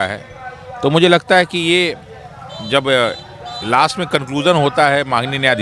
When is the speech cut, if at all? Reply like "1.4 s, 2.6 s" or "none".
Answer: none